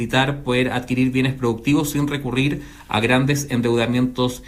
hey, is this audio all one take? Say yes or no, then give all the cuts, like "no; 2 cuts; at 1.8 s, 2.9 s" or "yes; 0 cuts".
yes; 0 cuts